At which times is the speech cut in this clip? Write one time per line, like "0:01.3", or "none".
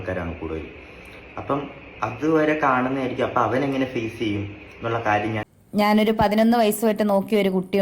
0:05.4